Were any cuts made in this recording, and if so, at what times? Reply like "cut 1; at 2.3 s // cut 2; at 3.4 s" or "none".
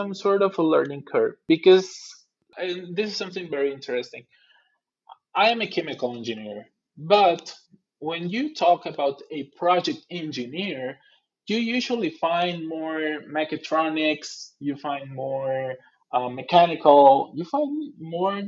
cut 1; at 1.4 s // cut 2; at 2.5 s